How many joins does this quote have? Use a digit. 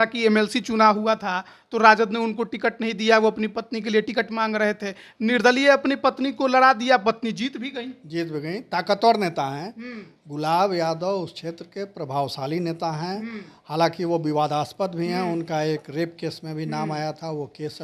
0